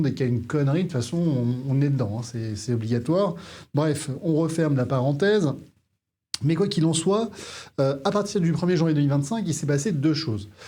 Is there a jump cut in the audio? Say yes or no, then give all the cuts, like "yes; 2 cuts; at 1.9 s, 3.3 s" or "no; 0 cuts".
no; 0 cuts